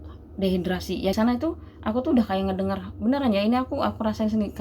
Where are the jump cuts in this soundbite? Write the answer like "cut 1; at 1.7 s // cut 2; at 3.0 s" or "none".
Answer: cut 1; at 1.1 s